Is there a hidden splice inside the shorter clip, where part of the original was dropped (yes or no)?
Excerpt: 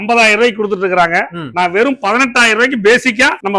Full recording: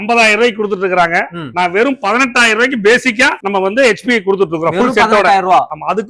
no